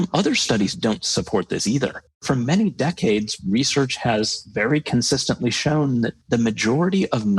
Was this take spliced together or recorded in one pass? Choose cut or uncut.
cut